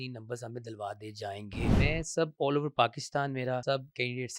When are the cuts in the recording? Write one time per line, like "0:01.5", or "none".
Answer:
0:01.8
0:03.6